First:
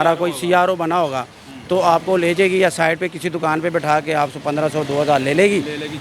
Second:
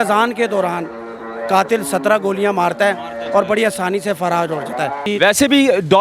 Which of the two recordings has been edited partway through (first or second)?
second